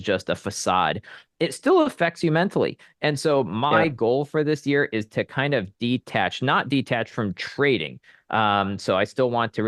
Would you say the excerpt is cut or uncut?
uncut